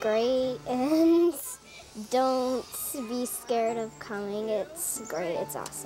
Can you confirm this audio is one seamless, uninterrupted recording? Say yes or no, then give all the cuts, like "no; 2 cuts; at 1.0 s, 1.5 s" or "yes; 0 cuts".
yes; 0 cuts